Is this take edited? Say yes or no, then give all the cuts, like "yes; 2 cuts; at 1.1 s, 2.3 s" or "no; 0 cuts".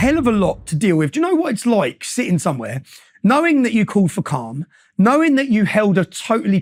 no; 0 cuts